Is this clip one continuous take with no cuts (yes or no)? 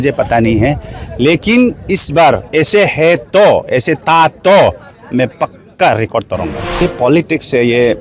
no